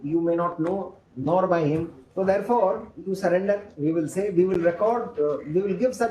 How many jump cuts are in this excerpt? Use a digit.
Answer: 1